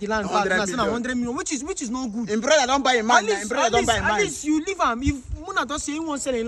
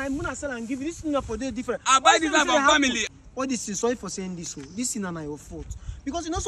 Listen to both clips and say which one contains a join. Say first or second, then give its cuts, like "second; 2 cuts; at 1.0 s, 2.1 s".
second; 1 cut; at 3.0 s